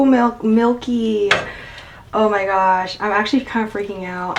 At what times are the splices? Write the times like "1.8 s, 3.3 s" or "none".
none